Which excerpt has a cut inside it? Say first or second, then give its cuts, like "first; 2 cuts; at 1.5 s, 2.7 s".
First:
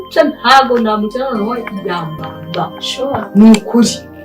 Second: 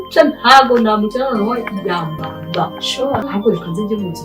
second; 1 cut; at 3.3 s